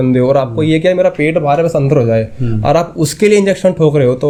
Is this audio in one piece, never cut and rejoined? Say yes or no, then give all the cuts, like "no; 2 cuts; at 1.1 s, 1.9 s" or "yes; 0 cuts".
yes; 0 cuts